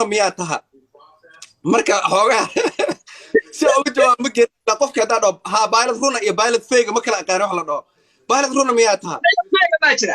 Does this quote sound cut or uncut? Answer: uncut